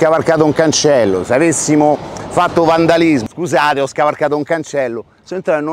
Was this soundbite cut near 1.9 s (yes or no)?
no